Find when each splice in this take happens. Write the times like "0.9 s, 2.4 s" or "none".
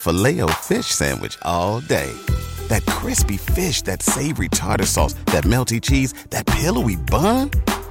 none

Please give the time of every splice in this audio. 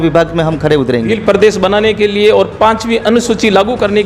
1.1 s

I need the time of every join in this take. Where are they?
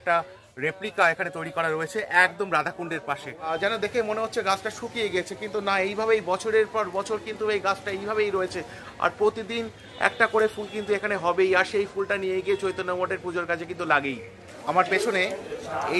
3.6 s, 14.3 s

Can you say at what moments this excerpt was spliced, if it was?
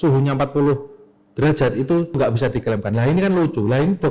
2.2 s

